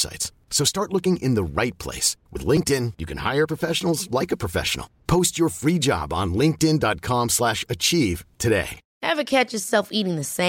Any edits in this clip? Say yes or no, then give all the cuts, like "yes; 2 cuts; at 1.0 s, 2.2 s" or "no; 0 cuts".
yes; 1 cut; at 8.8 s